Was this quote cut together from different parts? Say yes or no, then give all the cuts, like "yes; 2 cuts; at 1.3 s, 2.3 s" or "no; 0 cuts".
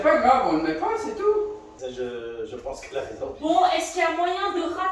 yes; 1 cut; at 1.7 s